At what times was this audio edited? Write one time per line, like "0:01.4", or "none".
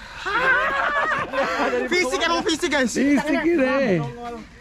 none

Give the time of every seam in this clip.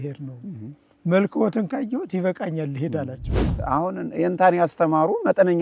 0:03.5

